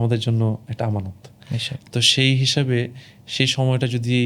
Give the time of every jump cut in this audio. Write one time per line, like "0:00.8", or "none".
none